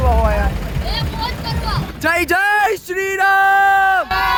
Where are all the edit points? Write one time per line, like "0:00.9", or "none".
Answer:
none